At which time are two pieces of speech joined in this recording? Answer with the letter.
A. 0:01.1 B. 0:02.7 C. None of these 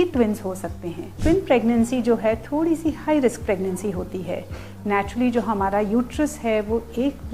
A